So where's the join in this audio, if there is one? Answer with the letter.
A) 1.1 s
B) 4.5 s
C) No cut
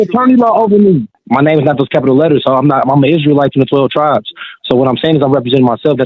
A